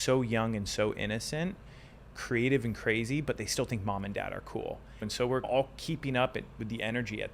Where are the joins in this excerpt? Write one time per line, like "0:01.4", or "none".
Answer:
0:02.1
0:05.1